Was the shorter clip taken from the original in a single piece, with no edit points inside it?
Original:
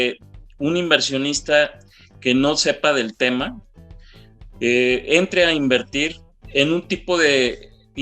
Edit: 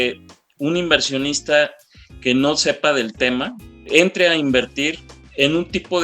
no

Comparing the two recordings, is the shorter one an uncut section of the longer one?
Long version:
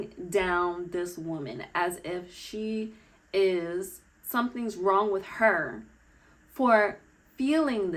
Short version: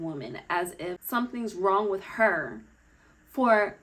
no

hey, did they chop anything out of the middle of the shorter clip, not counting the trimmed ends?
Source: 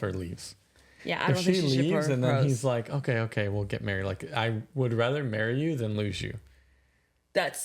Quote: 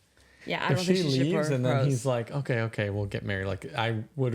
no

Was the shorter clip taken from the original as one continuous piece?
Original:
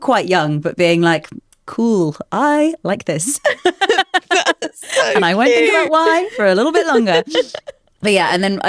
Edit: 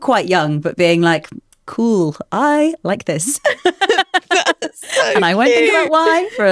yes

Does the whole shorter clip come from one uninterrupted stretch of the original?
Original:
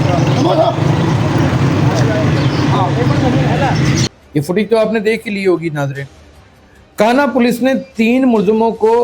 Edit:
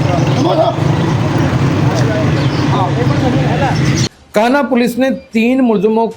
no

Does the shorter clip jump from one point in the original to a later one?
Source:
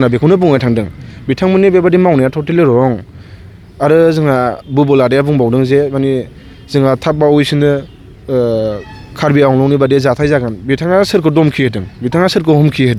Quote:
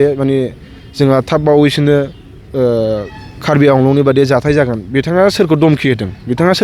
no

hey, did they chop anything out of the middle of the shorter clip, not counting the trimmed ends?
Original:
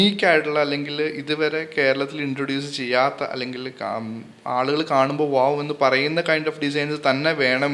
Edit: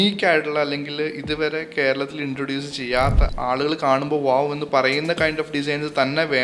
yes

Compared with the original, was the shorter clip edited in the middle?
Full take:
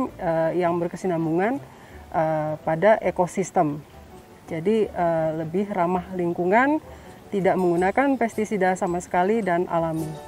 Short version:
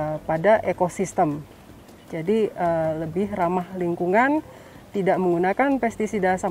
no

